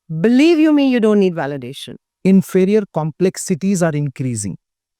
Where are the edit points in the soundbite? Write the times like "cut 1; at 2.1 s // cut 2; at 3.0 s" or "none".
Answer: cut 1; at 2.1 s